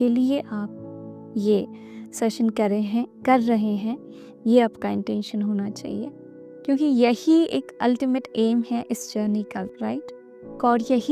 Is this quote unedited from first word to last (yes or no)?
yes